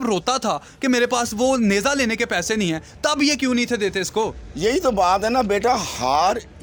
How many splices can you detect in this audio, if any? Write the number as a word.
zero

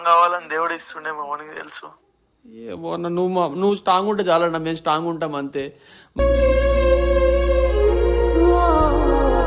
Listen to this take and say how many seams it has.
zero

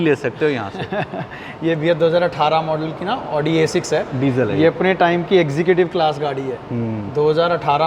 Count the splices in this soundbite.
zero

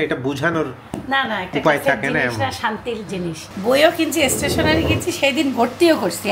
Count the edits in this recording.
one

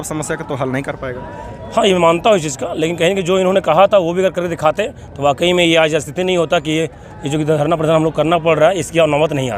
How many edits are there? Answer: zero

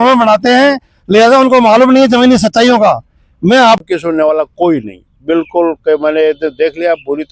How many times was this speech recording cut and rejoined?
one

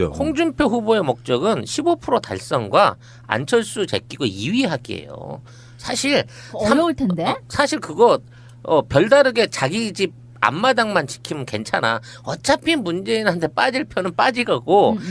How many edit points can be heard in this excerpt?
one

